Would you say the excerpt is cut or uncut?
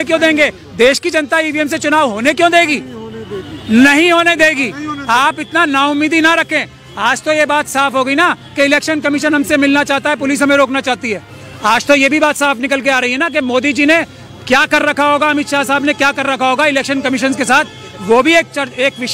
uncut